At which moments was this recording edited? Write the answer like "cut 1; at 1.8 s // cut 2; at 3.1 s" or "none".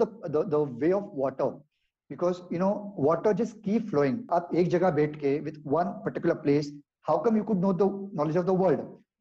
cut 1; at 4.3 s